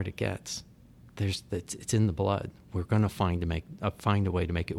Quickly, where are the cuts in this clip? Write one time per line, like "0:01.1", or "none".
none

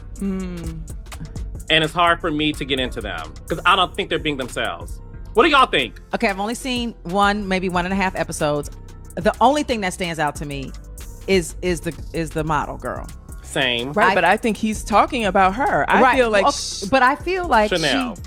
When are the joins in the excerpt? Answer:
none

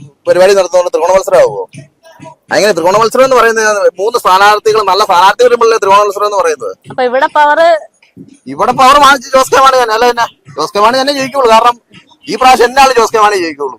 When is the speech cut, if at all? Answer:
none

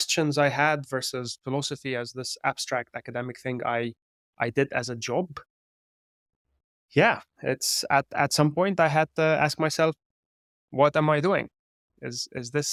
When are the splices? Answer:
none

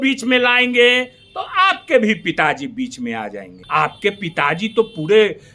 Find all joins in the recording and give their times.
0:03.5

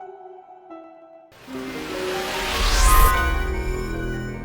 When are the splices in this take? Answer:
0:01.3

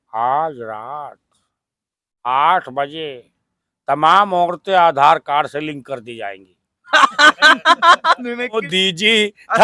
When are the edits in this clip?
0:08.7

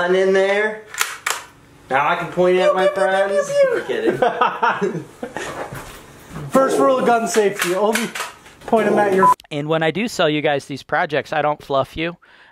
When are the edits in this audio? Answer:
0:09.3

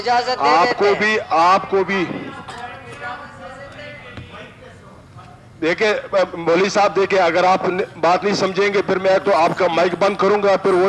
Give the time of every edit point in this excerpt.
none

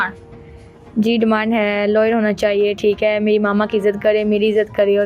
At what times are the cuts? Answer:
none

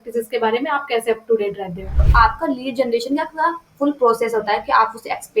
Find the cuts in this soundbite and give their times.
0:02.0

